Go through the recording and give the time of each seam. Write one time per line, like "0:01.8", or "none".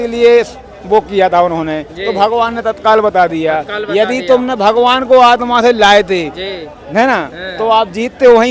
none

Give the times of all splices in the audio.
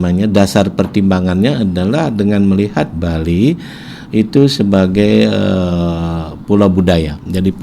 none

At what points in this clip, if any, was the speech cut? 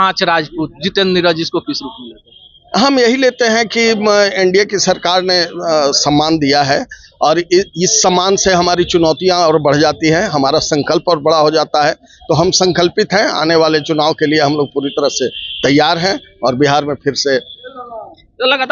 none

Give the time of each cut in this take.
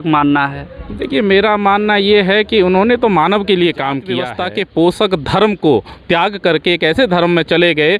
0:04.3

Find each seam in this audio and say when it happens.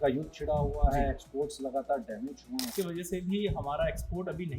0:02.7

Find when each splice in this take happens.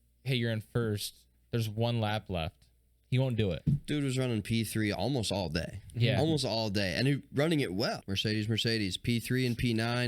0:08.1

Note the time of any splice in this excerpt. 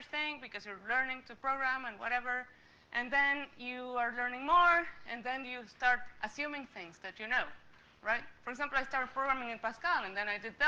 none

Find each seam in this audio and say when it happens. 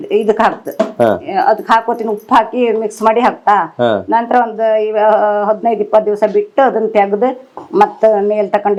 none

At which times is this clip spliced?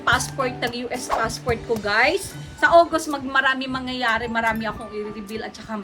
0:02.4

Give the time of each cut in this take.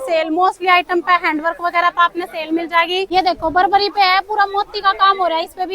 0:03.1

